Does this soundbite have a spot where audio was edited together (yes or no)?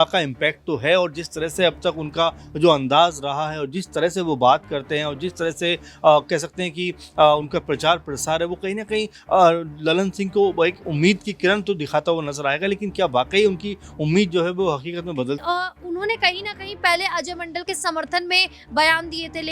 yes